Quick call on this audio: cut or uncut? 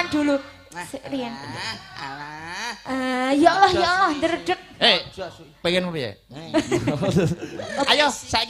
cut